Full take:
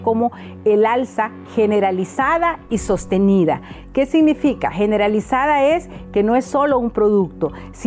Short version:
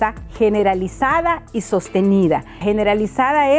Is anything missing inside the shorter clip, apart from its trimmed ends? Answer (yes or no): yes